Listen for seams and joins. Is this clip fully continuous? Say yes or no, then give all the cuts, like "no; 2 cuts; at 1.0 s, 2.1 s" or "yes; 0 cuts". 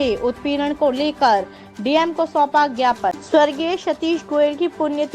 no; 1 cut; at 3.2 s